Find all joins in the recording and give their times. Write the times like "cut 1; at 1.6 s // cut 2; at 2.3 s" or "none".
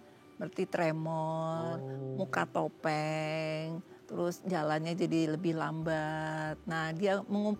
none